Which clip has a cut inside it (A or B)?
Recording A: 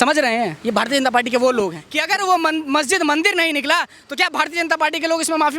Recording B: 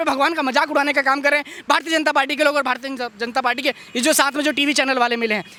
A